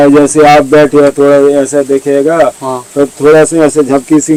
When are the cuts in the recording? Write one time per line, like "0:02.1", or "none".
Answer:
none